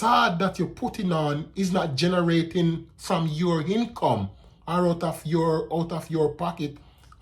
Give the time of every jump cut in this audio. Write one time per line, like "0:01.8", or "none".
none